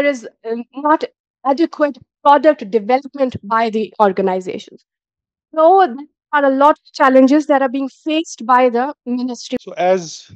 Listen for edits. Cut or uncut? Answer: cut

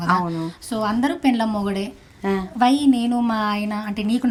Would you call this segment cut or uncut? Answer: uncut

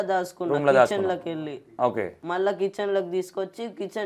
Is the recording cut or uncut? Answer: cut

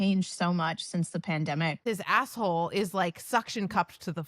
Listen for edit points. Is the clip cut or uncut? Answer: cut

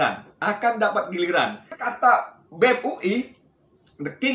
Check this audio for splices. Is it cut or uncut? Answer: cut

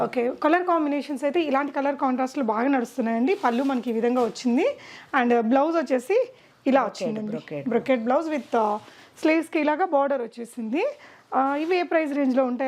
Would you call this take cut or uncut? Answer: uncut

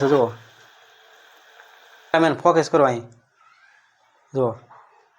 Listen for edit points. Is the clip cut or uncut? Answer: cut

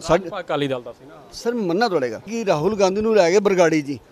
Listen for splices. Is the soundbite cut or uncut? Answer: cut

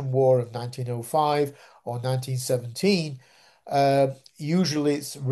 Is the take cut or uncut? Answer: uncut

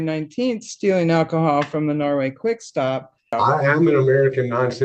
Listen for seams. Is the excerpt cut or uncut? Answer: cut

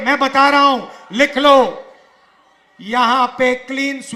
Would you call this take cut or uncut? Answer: uncut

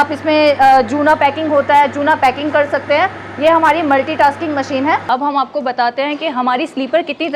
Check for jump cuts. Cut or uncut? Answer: cut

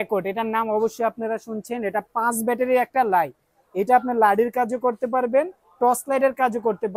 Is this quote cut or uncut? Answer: uncut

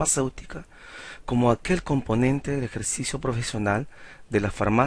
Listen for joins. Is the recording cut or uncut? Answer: uncut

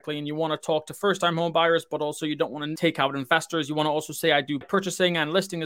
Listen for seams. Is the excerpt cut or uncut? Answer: cut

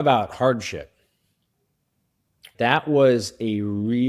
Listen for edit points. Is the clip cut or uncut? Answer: cut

